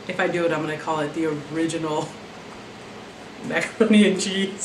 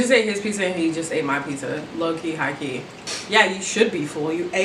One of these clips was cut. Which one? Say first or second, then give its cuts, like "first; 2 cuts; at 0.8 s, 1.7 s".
second; 1 cut; at 3.0 s